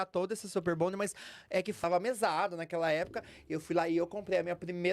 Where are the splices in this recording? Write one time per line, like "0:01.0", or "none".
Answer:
0:01.8